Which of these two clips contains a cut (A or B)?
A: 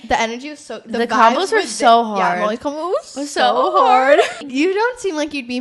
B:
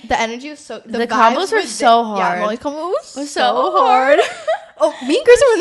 A